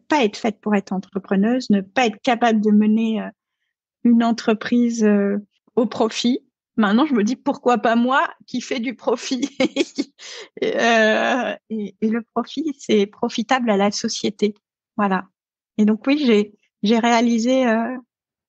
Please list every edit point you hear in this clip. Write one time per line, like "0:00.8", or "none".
0:05.5
0:06.5

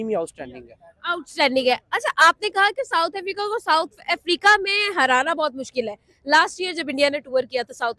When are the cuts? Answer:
none

